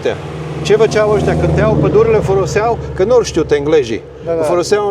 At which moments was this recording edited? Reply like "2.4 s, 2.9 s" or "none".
none